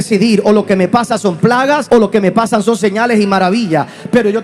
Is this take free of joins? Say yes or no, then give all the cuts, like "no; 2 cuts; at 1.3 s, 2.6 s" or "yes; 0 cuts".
no; 1 cut; at 1.8 s